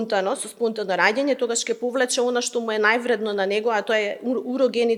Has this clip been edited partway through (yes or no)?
no